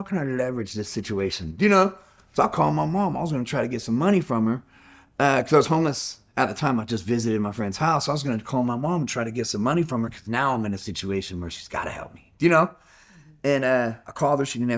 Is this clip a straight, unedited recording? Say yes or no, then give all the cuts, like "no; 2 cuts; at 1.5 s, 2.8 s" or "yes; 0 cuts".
yes; 0 cuts